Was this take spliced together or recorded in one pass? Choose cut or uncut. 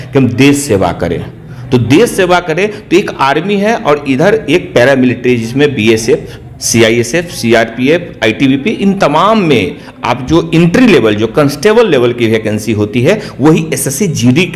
uncut